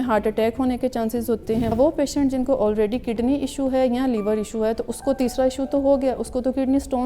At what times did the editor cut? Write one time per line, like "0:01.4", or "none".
0:01.7